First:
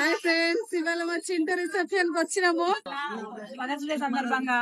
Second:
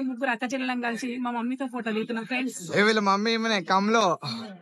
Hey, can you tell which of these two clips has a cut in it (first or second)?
first